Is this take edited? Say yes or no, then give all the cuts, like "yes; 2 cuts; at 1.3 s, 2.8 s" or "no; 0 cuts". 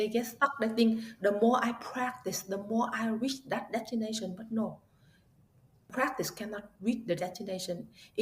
yes; 1 cut; at 5.9 s